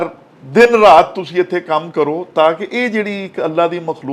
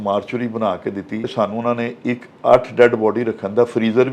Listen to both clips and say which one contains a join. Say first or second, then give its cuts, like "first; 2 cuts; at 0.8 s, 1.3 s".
second; 1 cut; at 1.3 s